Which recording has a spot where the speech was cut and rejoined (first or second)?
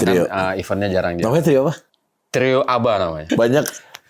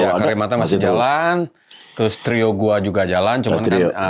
first